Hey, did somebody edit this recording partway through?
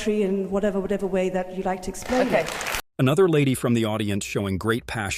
no; 0 cuts

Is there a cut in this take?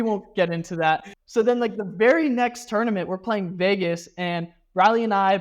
yes; 1 cut; at 1.1 s

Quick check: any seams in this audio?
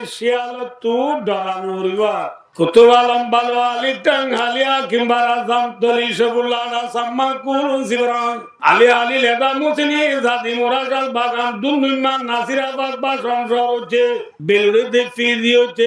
yes; 3 cuts; at 2.4 s, 8.5 s, 14.3 s

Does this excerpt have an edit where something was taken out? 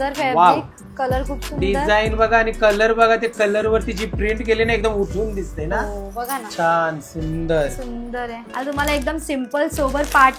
yes; 1 cut; at 8.4 s

